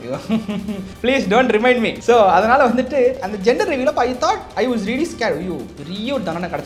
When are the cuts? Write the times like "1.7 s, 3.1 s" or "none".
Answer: 0.9 s, 1.9 s, 3.3 s, 4.5 s